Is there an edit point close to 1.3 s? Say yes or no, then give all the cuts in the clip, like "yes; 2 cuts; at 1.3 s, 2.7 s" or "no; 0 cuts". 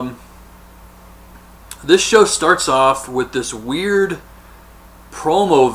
no; 1 cut; at 2.9 s